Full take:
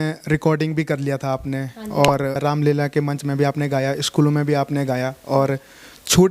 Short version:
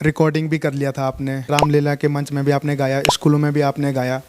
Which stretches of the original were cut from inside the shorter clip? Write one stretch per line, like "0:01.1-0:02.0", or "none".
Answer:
0:01.7-0:02.4